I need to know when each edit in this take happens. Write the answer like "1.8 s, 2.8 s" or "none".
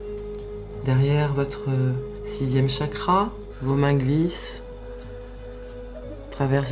3.5 s